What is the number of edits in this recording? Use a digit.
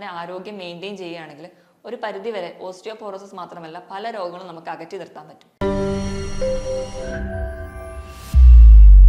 1